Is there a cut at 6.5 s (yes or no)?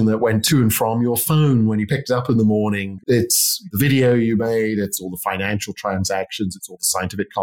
no